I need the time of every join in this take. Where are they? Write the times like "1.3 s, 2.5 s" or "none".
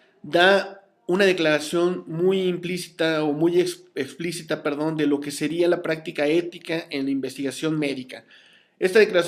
1.5 s

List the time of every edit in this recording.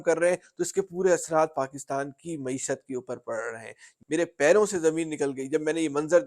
3.9 s

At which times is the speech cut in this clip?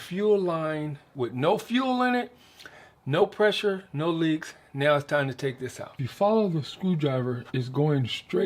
1.0 s, 6.0 s

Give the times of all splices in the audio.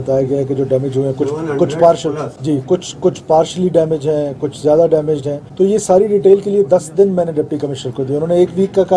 2.3 s, 5.4 s

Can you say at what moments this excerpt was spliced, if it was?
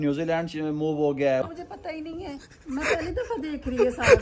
1.4 s

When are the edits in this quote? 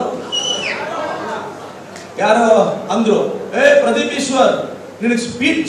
none

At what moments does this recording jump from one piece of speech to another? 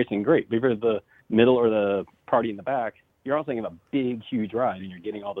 1.1 s, 2.1 s, 3.1 s

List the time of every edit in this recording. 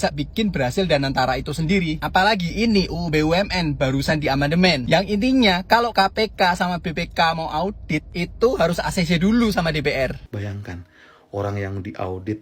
10.2 s

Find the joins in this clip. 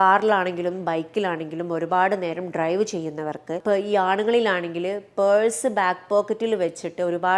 3.6 s

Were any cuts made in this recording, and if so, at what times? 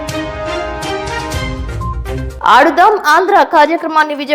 2.3 s

